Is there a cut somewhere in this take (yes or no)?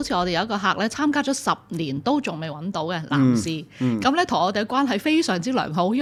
no